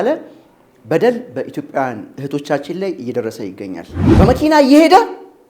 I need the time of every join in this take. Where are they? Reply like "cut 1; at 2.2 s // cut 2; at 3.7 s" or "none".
cut 1; at 4.0 s